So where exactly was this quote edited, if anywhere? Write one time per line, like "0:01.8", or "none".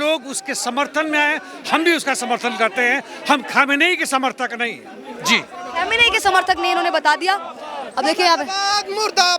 none